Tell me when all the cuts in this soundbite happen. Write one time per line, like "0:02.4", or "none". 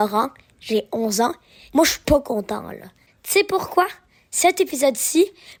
none